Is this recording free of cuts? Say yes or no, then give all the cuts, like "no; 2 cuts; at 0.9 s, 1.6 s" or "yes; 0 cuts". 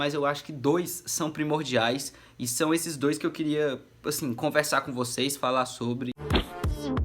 no; 1 cut; at 6.1 s